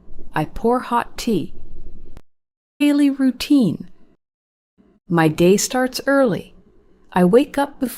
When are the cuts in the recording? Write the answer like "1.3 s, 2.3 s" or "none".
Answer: 2.8 s